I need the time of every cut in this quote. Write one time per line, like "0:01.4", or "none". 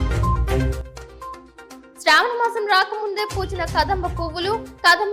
0:01.1